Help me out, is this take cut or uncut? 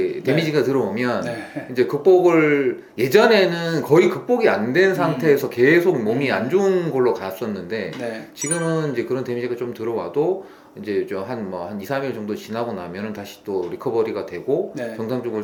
uncut